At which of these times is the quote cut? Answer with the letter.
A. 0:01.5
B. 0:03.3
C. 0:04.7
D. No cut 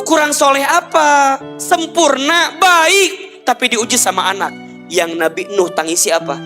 A